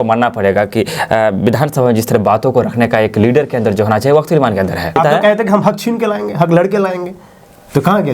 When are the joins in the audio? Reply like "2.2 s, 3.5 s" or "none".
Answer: 4.9 s